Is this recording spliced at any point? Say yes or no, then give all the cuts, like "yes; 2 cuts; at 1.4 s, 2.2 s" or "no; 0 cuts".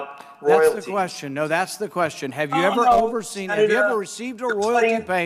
no; 0 cuts